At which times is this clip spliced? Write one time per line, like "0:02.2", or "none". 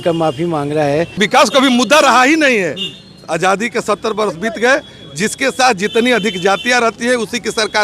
0:01.1